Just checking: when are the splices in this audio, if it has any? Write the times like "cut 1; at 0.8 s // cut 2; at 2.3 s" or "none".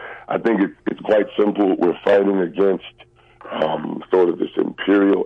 none